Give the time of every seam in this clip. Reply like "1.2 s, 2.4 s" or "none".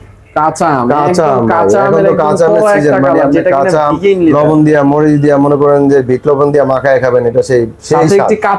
none